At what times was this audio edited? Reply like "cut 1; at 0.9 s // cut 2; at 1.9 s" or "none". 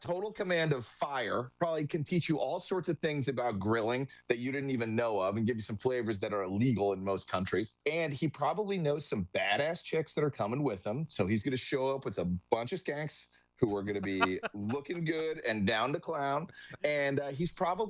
cut 1; at 7.7 s